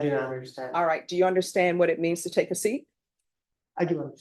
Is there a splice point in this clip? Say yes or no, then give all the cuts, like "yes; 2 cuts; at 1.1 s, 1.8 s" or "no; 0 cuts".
no; 0 cuts